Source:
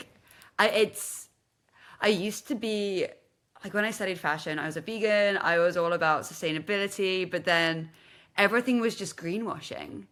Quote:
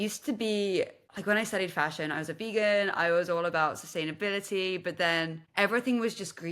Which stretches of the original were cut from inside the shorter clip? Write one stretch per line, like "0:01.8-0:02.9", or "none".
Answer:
0:03.3-0:03.5
0:07.9-0:08.2